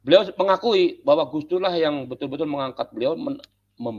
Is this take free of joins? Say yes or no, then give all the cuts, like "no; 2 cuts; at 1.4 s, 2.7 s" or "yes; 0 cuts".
yes; 0 cuts